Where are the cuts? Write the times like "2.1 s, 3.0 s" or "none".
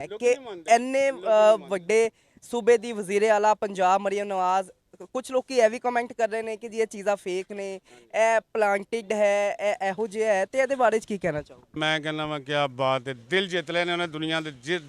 11.7 s